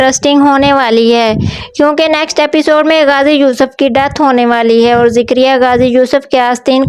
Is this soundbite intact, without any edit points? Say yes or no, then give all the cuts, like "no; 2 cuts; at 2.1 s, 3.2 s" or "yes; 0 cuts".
yes; 0 cuts